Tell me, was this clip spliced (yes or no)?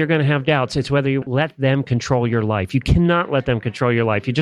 no